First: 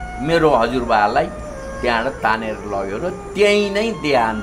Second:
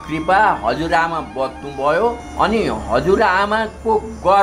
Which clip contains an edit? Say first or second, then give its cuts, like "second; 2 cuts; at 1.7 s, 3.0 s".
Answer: second; 1 cut; at 2.2 s